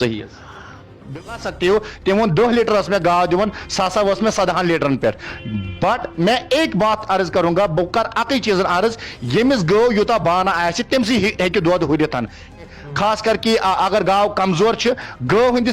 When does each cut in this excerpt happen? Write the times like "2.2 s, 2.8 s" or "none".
1.0 s, 12.6 s